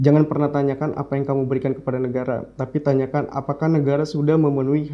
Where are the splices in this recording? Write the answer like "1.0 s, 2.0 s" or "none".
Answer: none